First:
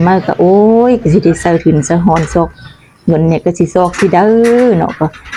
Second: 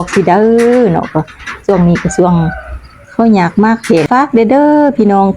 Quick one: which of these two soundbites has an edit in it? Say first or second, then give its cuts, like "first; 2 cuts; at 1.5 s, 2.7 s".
second; 1 cut; at 4.1 s